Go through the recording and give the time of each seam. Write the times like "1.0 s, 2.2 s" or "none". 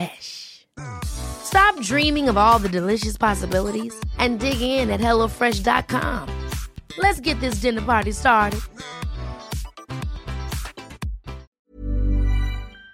11.5 s